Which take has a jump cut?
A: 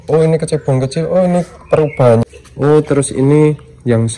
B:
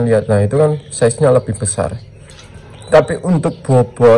A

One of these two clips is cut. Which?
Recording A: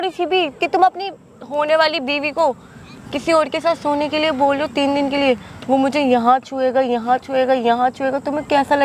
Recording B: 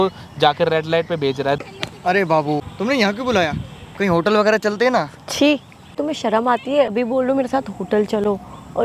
B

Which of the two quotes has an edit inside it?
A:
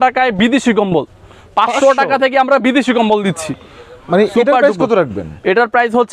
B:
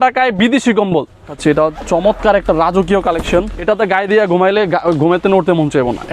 B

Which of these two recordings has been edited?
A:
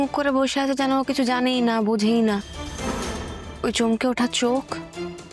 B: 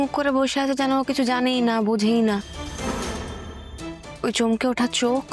A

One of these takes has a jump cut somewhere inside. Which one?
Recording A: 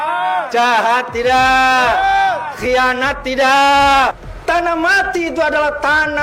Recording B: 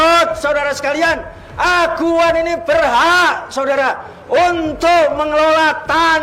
A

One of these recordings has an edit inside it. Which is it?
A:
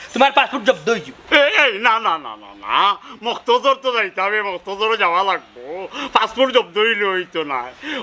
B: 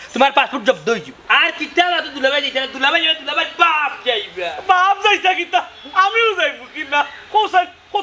B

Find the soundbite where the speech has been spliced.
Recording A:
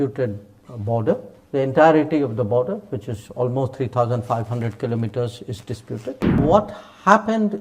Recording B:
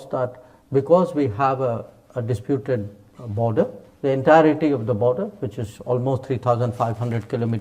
A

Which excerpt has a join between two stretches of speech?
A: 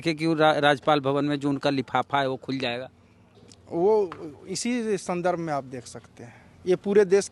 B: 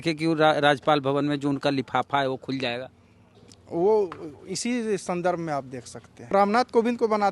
B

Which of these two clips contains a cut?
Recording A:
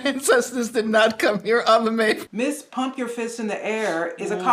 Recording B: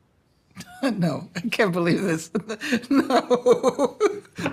A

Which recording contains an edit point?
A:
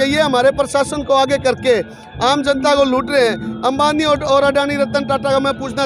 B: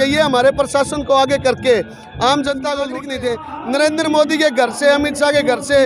B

